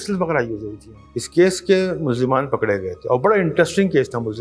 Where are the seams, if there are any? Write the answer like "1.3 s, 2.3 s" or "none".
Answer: 1.0 s